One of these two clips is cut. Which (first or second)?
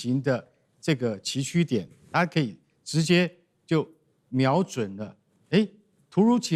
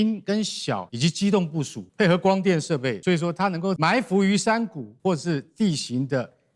second